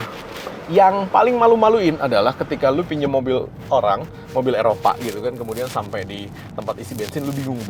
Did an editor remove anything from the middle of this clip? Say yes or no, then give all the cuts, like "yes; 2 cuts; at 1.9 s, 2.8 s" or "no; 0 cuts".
no; 0 cuts